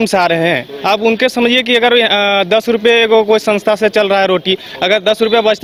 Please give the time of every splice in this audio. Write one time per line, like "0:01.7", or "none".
none